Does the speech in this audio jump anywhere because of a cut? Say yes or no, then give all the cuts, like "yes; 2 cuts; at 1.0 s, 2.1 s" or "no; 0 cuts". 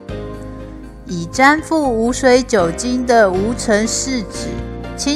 yes; 1 cut; at 1.0 s